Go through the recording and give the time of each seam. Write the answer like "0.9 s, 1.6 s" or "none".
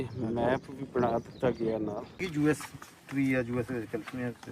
2.2 s